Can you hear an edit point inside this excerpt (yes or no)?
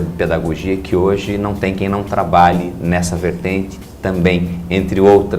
yes